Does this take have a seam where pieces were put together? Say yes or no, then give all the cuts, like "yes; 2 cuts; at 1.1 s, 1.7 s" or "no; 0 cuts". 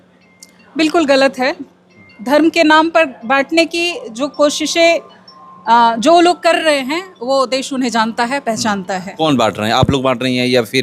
no; 0 cuts